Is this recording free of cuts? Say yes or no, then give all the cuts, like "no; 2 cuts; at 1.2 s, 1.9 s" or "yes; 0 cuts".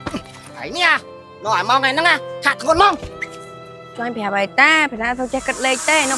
yes; 0 cuts